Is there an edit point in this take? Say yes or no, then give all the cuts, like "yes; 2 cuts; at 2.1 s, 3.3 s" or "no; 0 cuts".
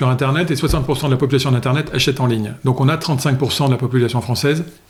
no; 0 cuts